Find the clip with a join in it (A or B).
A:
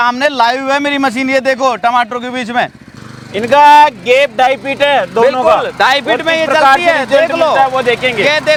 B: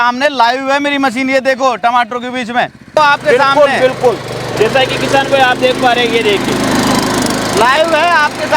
B